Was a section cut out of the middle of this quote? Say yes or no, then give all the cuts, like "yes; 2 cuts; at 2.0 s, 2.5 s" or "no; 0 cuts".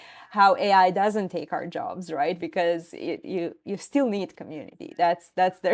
no; 0 cuts